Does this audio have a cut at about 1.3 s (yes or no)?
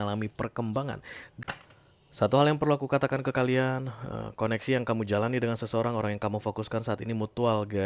yes